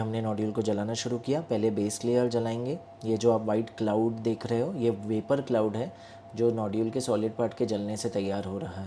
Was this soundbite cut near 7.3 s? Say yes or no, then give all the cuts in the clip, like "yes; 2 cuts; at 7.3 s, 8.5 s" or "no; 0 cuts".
no; 1 cut; at 2.9 s